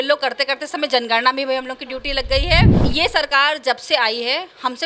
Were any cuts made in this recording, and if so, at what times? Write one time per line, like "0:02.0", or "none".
0:02.8